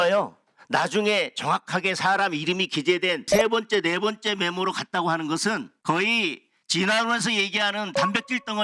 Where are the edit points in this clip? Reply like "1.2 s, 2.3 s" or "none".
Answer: 3.3 s, 5.7 s